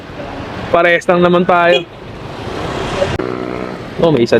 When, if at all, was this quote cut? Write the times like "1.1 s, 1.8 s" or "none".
3.2 s